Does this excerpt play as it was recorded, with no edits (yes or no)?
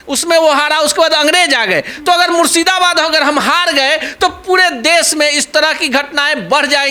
yes